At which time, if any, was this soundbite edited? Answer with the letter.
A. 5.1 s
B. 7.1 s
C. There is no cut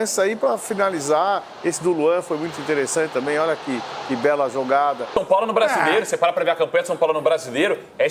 A